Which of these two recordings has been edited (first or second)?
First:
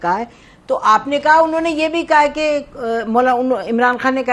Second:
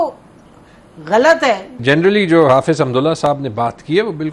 second